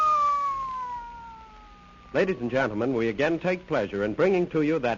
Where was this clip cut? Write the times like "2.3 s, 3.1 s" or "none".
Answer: 2.8 s

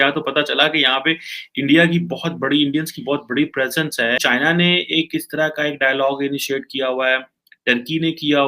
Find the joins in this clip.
4.2 s

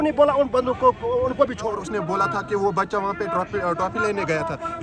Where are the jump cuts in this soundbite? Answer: 1.8 s

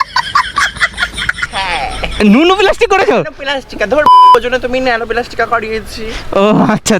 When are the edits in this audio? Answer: 1.4 s

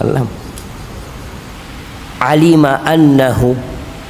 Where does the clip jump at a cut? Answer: 1.6 s

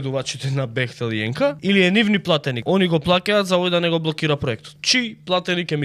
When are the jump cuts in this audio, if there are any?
1.6 s, 2.5 s, 4.7 s

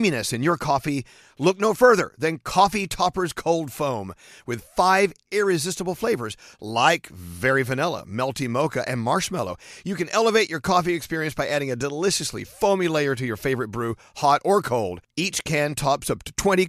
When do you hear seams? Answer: none

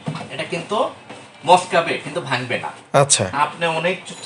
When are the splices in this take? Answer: none

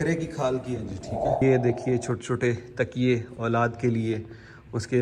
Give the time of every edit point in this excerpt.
1.4 s

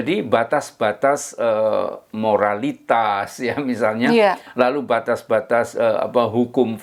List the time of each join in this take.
none

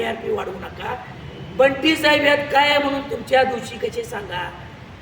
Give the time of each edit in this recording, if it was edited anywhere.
none

